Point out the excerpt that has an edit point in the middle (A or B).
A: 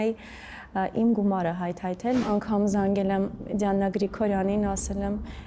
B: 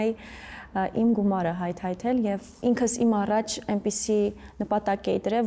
A